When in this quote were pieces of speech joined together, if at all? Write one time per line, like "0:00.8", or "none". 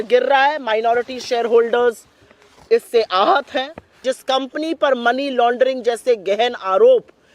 0:03.9

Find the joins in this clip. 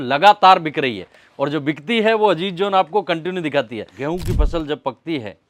0:03.8

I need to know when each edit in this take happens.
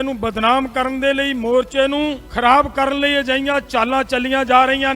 0:02.2

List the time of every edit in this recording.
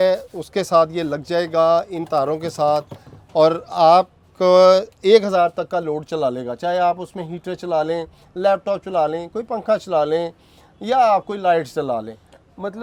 none

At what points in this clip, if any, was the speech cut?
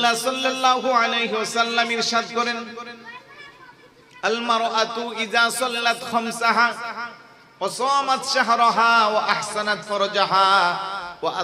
none

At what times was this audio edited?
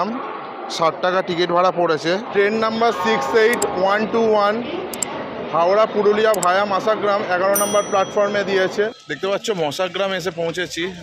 0:02.3
0:09.0

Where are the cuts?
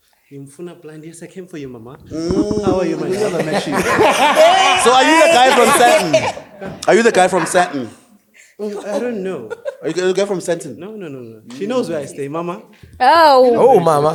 none

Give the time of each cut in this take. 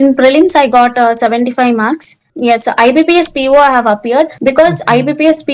0:02.2
0:04.3

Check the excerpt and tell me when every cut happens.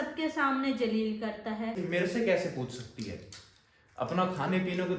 0:01.8

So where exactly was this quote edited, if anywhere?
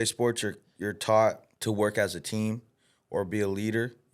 0:01.5

